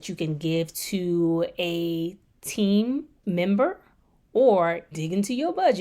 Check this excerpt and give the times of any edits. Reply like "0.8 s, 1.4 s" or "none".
3.1 s